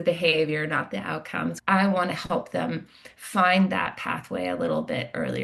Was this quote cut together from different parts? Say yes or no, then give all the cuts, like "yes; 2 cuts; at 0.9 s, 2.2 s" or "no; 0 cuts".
yes; 1 cut; at 1.6 s